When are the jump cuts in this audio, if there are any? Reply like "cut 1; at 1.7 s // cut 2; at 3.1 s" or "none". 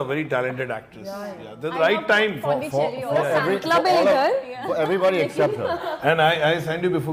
cut 1; at 6.0 s

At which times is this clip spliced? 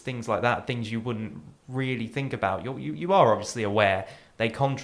none

